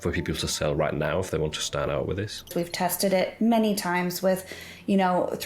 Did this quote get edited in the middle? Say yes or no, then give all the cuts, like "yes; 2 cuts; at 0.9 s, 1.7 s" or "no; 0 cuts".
yes; 1 cut; at 2.5 s